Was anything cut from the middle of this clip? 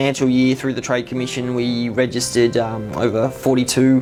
no; 0 cuts

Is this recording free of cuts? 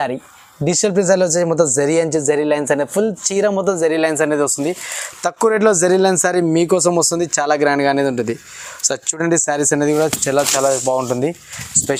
yes; 0 cuts

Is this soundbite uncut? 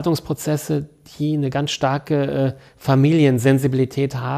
yes; 0 cuts

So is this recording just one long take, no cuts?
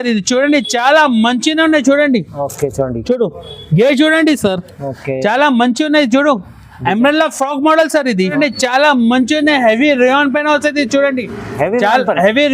no; 1 cut; at 8.2 s

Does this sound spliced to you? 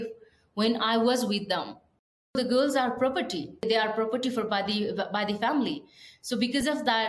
yes; 2 cuts; at 2.3 s, 3.6 s

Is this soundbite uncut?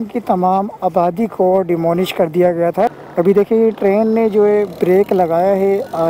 no; 1 cut; at 2.9 s

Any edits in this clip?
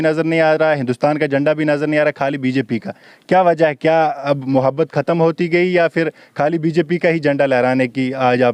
no; 0 cuts

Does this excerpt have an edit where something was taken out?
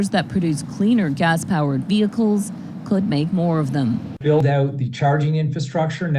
yes; 1 cut; at 4.1 s

